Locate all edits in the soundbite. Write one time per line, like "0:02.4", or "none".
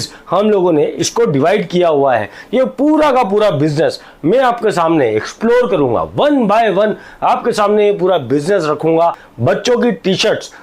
0:09.3